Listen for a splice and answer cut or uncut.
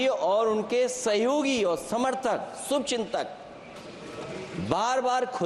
uncut